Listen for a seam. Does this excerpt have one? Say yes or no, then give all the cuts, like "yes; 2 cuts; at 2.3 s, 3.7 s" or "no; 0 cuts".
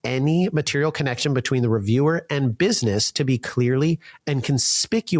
no; 0 cuts